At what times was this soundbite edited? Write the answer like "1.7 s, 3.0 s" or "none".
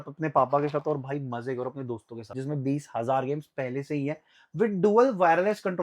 2.3 s

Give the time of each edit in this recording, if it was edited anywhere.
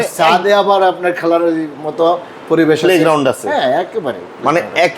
none

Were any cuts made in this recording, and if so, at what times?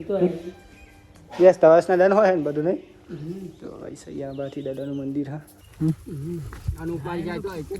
5.6 s

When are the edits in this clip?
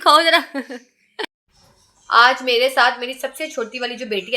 1.2 s

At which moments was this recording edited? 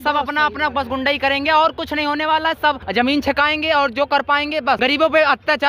2.8 s, 4.8 s

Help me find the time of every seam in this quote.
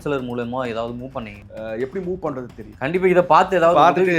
1.4 s, 2.6 s

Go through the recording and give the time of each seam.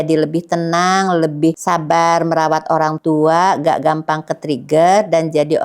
none

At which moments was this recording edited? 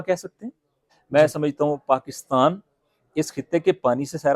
0.9 s

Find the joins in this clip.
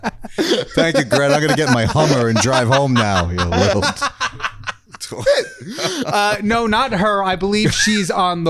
none

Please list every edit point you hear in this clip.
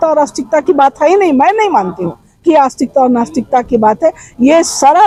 none

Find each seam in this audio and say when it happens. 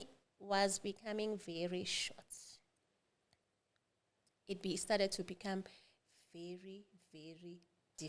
none

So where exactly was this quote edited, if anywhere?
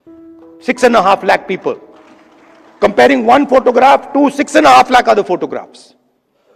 none

